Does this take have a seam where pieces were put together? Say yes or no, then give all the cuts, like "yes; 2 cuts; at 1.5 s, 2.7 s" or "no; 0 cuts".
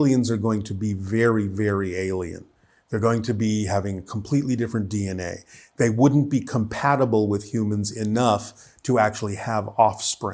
no; 0 cuts